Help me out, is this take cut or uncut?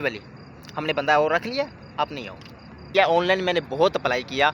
cut